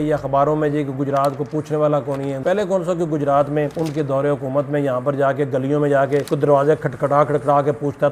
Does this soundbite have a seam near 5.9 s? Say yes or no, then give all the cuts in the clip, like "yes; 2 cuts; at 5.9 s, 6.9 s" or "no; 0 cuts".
no; 2 cuts; at 2.4 s, 3.7 s